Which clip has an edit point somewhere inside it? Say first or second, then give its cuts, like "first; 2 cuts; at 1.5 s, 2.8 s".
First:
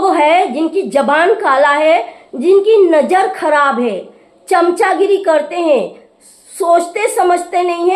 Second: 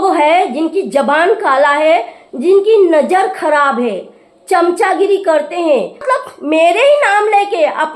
second; 1 cut; at 6.0 s